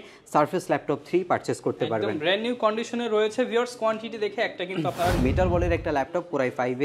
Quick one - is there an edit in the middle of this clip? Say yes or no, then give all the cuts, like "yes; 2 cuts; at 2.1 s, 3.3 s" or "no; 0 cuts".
yes; 1 cut; at 5.2 s